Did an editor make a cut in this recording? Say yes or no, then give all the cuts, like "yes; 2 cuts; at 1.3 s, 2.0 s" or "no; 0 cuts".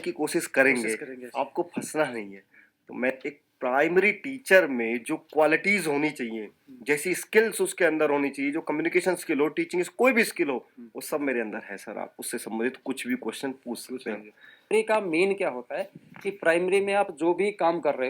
yes; 2 cuts; at 3.1 s, 14.7 s